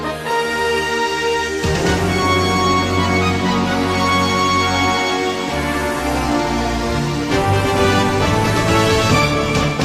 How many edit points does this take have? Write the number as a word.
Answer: zero